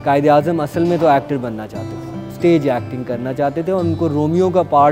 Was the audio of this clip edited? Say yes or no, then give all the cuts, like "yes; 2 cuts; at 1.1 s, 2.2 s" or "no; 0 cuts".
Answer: no; 0 cuts